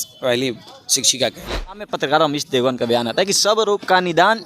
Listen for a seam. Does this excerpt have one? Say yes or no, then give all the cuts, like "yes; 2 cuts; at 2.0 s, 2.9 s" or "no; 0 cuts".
yes; 1 cut; at 1.7 s